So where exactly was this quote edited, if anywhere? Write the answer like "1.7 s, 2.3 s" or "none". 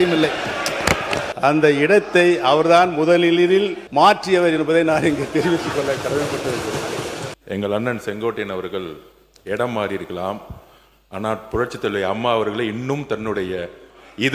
1.3 s, 3.8 s, 7.3 s